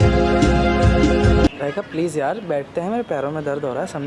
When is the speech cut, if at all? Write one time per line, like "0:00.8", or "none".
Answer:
0:01.6

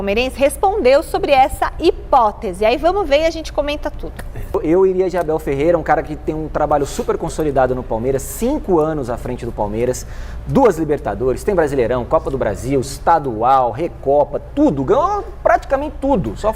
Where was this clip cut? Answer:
0:04.5

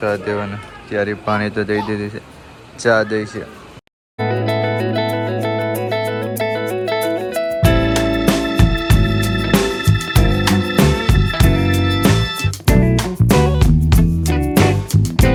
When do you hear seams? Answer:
none

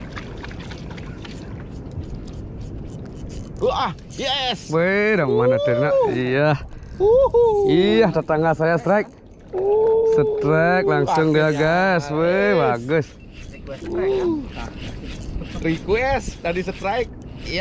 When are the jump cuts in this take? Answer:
none

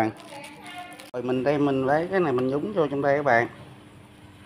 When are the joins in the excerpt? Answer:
0:01.1

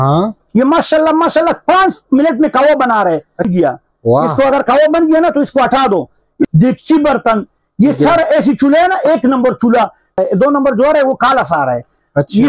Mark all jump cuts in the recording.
0:03.5
0:06.4
0:10.2

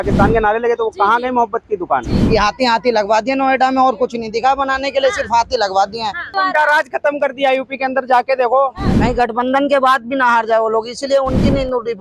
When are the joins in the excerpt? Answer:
0:02.1
0:06.3
0:08.9

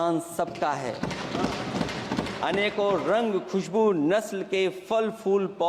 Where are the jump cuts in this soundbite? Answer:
none

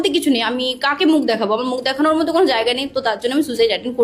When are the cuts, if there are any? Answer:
none

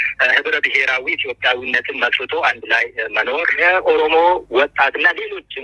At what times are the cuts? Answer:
0:03.5

